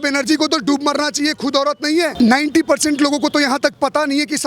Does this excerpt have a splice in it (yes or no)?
yes